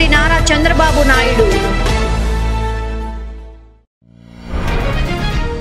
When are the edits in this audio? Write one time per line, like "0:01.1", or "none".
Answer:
0:04.0